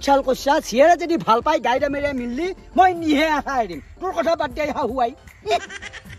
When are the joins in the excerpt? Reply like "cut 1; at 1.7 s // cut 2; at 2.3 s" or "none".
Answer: none

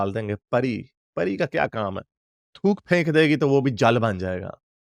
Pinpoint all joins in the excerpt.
none

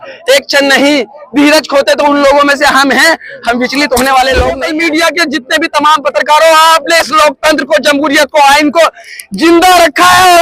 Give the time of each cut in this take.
cut 1; at 4.7 s

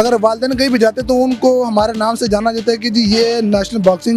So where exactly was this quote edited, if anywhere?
none

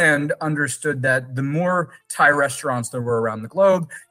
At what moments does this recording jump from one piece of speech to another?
none

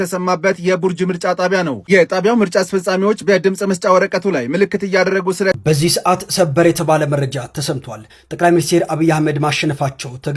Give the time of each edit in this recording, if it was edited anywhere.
cut 1; at 5.6 s

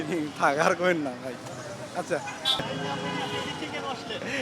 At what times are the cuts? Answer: none

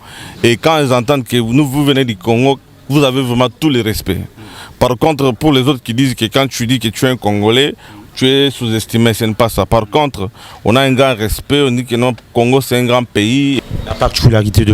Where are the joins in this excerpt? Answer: cut 1; at 13.6 s

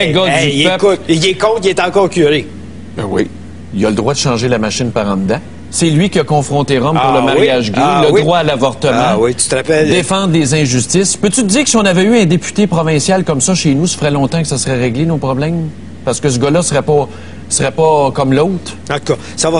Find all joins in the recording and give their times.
cut 1; at 11.7 s

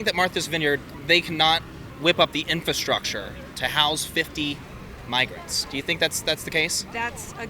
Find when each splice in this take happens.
cut 1; at 0.9 s // cut 2; at 1.8 s

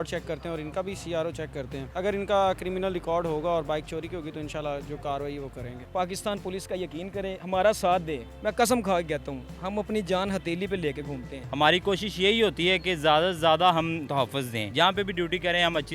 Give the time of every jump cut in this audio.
cut 1; at 1.8 s // cut 2; at 5.8 s // cut 3; at 11.4 s // cut 4; at 14.3 s

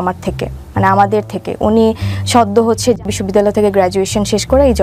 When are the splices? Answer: cut 1; at 3.1 s

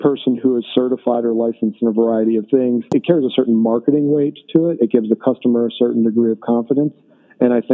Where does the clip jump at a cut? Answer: cut 1; at 2.8 s

